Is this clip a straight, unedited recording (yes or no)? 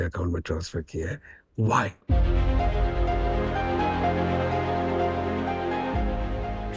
yes